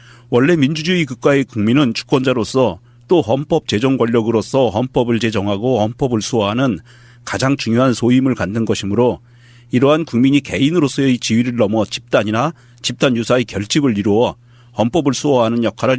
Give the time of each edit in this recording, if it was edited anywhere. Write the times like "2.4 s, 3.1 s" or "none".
5.7 s